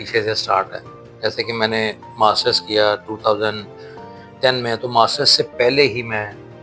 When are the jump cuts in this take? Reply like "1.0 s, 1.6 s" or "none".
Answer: none